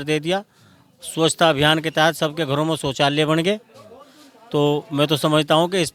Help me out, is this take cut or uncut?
uncut